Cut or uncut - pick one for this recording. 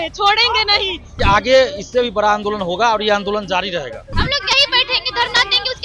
cut